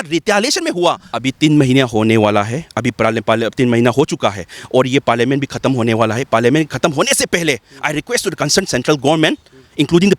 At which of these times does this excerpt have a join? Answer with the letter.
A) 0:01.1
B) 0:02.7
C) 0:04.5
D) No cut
A